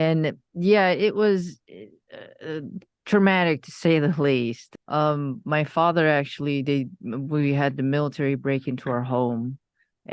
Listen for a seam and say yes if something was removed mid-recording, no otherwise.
yes